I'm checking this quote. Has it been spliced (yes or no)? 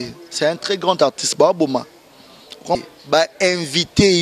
yes